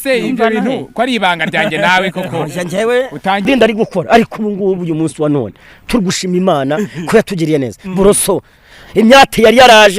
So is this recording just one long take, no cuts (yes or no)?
no